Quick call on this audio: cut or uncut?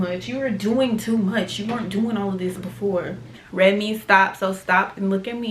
cut